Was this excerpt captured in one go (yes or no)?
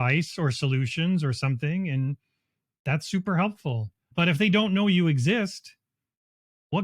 no